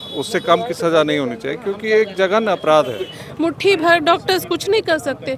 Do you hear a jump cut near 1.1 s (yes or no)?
no